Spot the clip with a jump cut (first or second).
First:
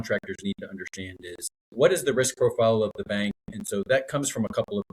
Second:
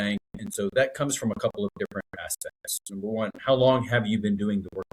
first